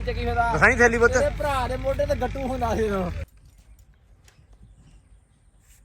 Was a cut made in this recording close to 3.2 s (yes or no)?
yes